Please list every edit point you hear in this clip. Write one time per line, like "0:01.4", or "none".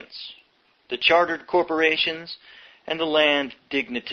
0:02.8